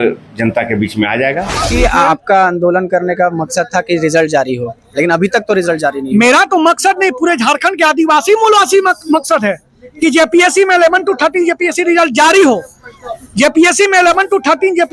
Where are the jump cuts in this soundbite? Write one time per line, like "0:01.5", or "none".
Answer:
0:01.6